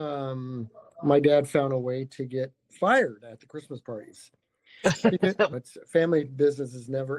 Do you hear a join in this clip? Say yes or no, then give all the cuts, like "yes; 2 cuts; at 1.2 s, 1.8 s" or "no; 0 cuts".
yes; 1 cut; at 5.5 s